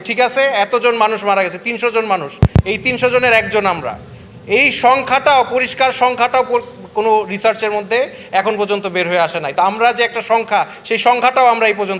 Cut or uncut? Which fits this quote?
uncut